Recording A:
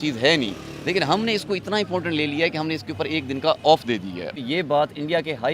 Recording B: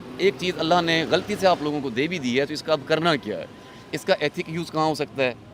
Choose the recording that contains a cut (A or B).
A